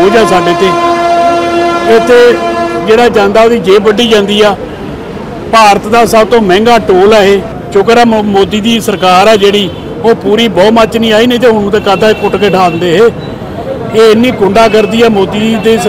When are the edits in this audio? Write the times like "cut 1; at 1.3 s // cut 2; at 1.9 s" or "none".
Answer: cut 1; at 7.6 s